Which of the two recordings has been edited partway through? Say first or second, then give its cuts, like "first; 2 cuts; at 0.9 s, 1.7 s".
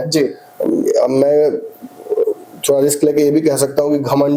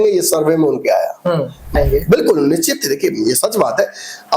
second; 1 cut; at 1.7 s